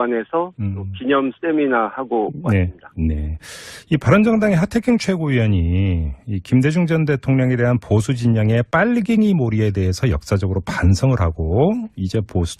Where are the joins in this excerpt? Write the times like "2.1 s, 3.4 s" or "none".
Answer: 10.9 s